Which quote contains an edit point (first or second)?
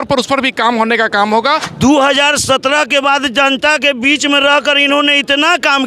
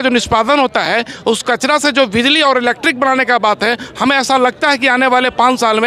first